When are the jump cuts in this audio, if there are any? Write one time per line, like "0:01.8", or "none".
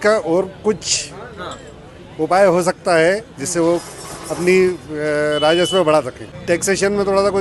0:06.3